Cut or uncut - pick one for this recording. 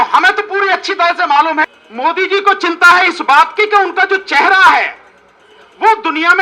cut